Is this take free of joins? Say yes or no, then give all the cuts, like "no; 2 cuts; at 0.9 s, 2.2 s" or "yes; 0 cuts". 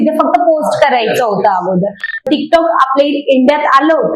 no; 1 cut; at 2.2 s